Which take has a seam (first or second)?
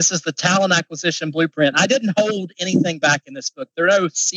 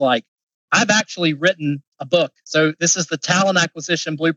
second